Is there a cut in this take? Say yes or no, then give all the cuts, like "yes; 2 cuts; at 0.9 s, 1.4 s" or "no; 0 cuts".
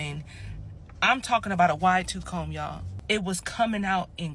yes; 1 cut; at 2.8 s